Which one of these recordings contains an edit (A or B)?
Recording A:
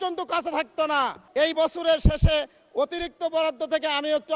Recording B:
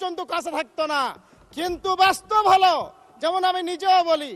A